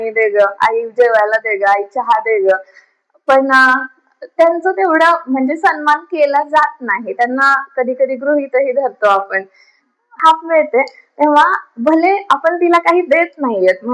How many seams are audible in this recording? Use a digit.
1